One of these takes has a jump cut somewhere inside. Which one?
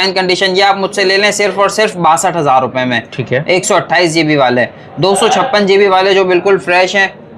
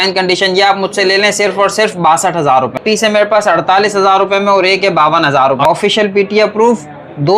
second; 2 cuts; at 2.8 s, 5.7 s

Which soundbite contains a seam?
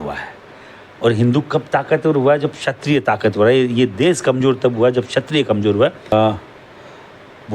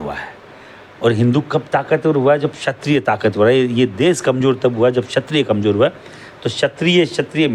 first; 1 cut; at 6.1 s

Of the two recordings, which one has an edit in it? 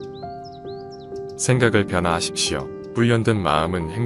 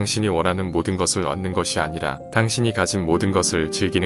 first; 1 cut; at 1.4 s

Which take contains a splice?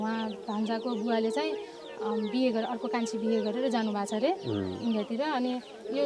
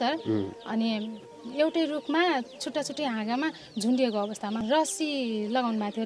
second; 2 cuts; at 1.4 s, 4.6 s

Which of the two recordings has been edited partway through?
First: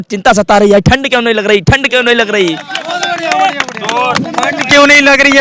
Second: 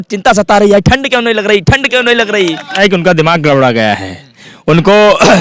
second; 1 cut; at 2.8 s

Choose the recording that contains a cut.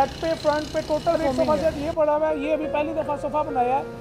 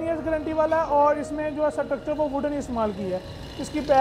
first; 1 cut; at 1.3 s

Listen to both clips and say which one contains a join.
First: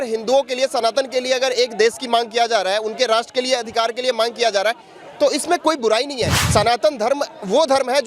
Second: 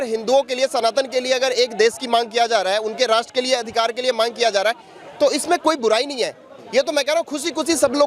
first; 1 cut; at 6.4 s

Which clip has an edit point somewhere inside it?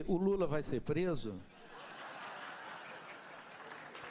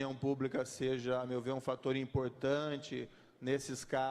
second; 1 cut; at 1.9 s

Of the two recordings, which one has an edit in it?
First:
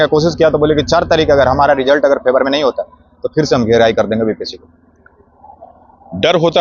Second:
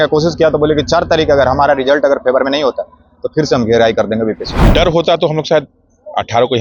second; 1 cut; at 4.5 s

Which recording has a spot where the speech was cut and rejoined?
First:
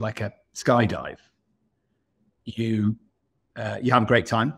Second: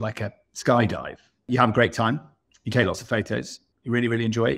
second; 2 cuts; at 1.3 s, 3.6 s

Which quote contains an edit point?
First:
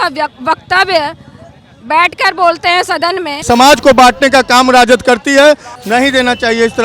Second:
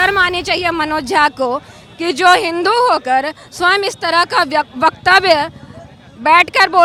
first; 2 cuts; at 3.4 s, 5.7 s

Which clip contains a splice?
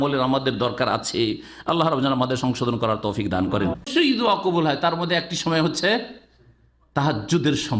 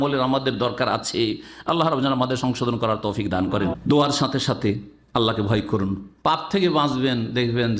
first; 1 cut; at 3.9 s

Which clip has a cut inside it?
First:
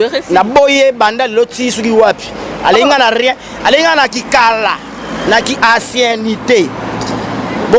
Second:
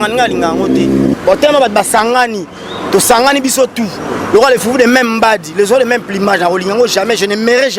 second; 1 cut; at 1.1 s

